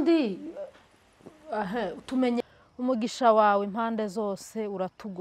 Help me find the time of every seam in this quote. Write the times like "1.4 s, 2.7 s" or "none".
2.4 s